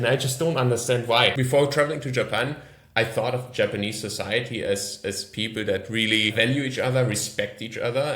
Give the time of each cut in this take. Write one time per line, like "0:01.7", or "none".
0:01.4
0:06.3